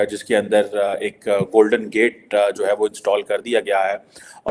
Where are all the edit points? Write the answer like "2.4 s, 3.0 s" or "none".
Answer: none

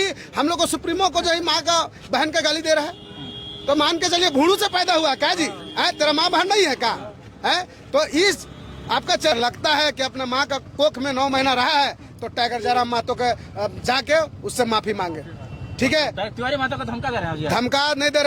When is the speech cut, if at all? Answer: 9.3 s

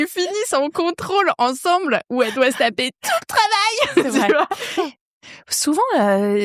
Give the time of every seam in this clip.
4.8 s

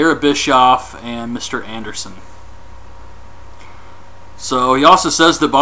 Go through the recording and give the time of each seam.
3.2 s

